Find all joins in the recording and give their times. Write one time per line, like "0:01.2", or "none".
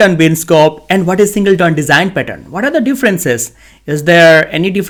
none